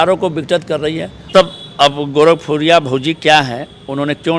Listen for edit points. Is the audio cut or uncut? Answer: cut